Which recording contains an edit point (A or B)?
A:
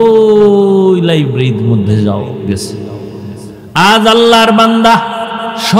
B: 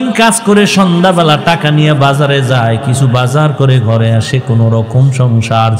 A